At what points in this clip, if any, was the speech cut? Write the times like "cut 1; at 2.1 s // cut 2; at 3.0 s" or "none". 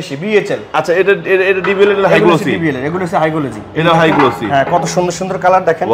none